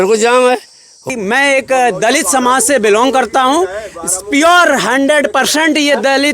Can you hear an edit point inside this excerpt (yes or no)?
yes